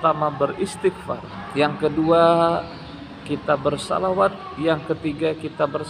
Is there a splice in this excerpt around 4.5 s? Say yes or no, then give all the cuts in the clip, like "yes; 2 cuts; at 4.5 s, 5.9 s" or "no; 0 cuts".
yes; 2 cuts; at 1.3 s, 4.5 s